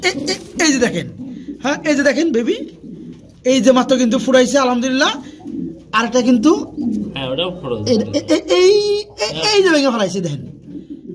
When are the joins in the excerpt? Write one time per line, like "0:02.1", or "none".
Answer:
none